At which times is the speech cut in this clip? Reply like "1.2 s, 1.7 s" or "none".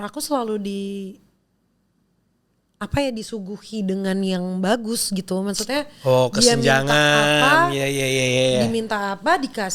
none